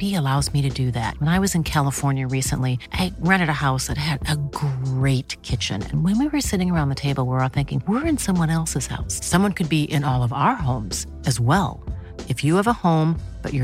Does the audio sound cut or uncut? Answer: uncut